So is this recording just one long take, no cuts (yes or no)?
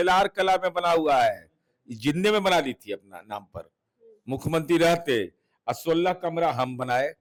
yes